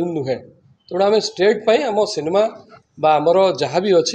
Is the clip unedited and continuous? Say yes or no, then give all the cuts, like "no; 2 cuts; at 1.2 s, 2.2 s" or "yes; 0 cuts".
yes; 0 cuts